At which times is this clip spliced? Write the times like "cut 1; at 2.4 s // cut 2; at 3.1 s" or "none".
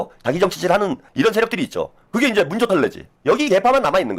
cut 1; at 1.0 s // cut 2; at 3.1 s